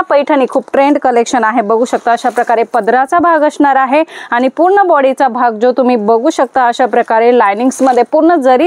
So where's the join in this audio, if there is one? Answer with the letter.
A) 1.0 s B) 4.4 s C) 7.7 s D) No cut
D